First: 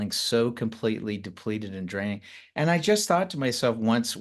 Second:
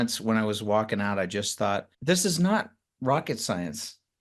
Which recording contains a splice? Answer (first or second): second